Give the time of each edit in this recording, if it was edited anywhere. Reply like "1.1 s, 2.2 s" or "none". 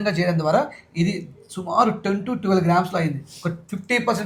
none